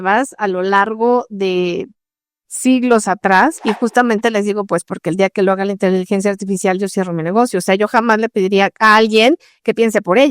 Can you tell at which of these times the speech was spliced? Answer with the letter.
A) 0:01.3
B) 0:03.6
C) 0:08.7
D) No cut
B